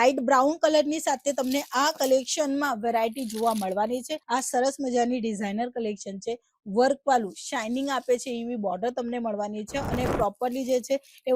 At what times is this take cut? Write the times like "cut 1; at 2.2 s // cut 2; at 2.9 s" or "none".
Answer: cut 1; at 4.2 s